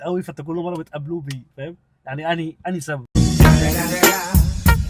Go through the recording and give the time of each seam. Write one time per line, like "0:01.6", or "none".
none